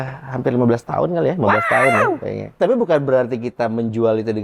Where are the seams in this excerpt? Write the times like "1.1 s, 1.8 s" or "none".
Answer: 2.5 s